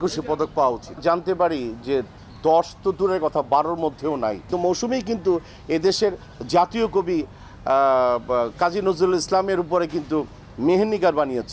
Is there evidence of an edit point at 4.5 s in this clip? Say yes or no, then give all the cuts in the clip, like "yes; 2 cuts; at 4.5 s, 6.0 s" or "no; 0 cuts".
yes; 2 cuts; at 1.0 s, 4.5 s